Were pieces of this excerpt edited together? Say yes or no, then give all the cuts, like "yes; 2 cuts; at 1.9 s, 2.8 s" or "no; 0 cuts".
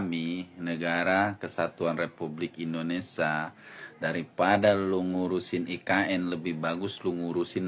no; 0 cuts